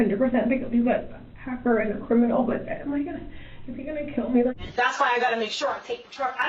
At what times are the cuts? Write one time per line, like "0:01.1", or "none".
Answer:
0:04.6